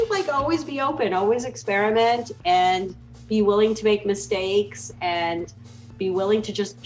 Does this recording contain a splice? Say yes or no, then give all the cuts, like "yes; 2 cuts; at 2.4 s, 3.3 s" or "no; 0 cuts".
no; 0 cuts